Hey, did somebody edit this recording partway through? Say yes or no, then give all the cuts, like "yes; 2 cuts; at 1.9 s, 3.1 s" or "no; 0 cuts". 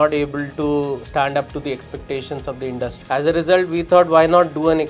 yes; 2 cuts; at 1.0 s, 3.0 s